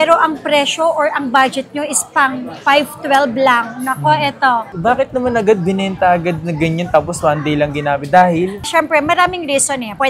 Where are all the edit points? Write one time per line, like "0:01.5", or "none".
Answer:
0:04.7